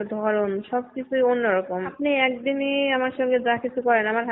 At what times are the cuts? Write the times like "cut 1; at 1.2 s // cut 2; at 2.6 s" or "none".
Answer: cut 1; at 1.9 s